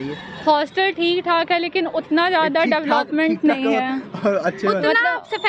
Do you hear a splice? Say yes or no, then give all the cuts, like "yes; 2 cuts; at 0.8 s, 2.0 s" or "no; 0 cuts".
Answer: no; 0 cuts